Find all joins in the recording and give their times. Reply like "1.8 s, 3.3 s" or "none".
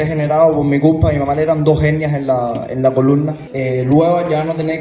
3.4 s